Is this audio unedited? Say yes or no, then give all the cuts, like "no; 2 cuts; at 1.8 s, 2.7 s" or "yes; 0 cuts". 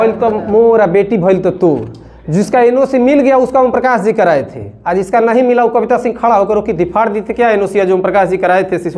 yes; 0 cuts